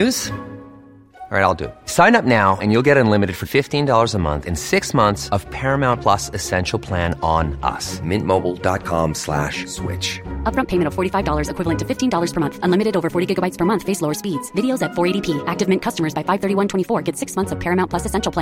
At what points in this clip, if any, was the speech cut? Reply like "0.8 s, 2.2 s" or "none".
none